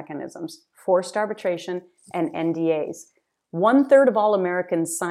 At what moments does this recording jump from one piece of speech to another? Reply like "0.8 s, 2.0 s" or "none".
none